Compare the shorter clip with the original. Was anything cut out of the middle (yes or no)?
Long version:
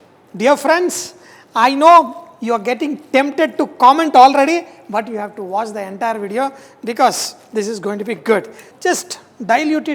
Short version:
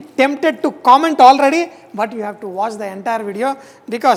no